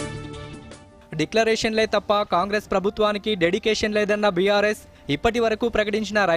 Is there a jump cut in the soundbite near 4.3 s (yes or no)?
no